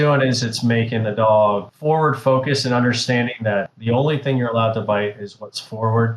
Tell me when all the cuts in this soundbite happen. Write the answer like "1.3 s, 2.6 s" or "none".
1.7 s, 3.7 s